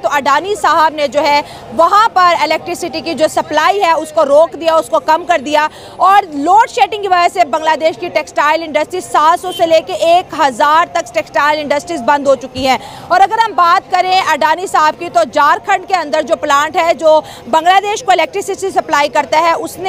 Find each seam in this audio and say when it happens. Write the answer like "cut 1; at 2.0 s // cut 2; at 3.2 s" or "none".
none

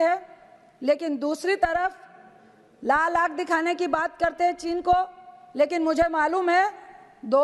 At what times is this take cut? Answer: none

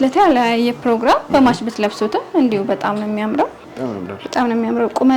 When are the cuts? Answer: cut 1; at 3.6 s

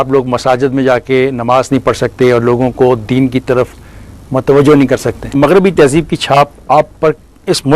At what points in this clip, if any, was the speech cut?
cut 1; at 5.3 s

